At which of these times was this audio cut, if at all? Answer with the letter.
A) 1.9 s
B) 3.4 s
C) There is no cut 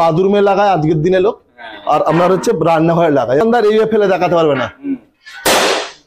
B